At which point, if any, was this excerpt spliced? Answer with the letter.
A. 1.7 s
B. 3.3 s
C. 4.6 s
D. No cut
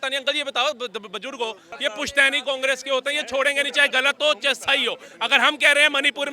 A